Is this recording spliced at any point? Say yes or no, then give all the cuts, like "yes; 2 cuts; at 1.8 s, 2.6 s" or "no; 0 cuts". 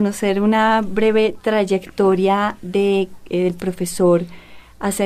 yes; 1 cut; at 2.5 s